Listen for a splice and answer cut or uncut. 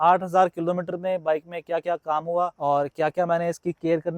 cut